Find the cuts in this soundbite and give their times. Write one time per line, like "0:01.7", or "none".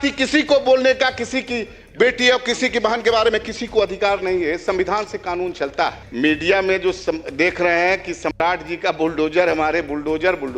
0:06.0